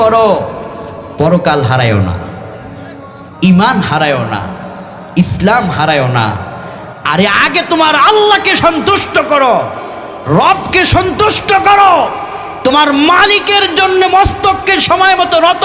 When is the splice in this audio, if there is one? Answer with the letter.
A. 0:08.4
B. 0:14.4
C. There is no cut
C